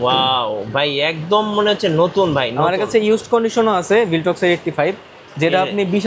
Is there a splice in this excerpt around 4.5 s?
no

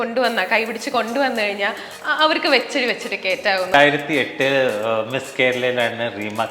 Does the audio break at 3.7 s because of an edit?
yes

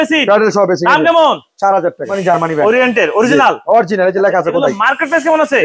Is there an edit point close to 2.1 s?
yes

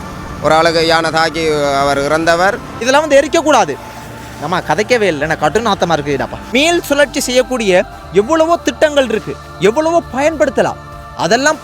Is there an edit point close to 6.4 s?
yes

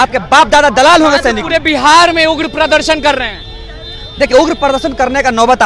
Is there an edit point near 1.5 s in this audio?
no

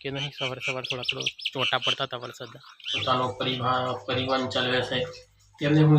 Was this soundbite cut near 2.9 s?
yes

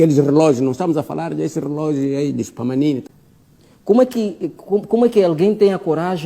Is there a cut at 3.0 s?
yes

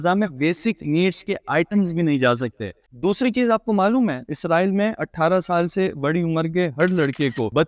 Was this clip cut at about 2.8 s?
yes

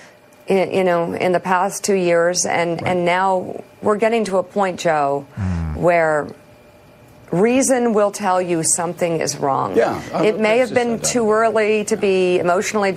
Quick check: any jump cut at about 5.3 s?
no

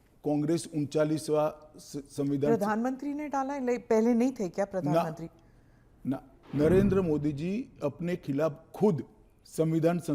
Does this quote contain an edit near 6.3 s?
yes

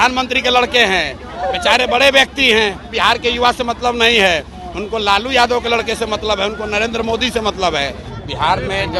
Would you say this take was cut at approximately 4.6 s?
no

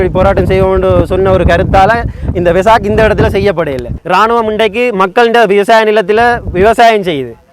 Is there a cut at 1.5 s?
no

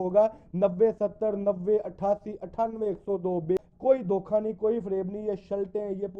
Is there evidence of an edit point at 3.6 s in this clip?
yes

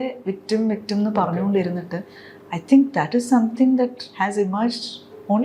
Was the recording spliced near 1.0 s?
no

